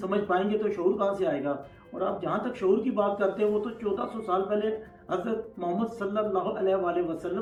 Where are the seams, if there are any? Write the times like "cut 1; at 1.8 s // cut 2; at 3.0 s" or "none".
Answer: none